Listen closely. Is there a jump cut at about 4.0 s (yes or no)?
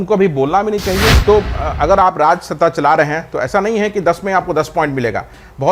no